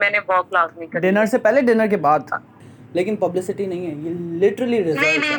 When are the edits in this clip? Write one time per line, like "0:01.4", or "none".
0:02.7